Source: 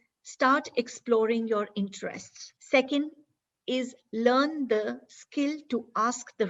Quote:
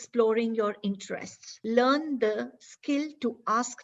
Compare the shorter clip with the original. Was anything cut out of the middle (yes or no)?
yes